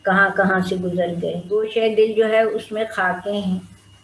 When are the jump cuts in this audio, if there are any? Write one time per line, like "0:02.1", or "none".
0:01.6